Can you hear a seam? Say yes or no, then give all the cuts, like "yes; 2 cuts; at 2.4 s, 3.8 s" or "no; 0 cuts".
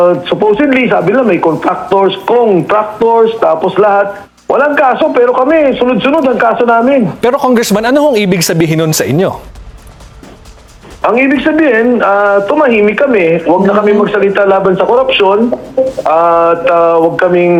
no; 0 cuts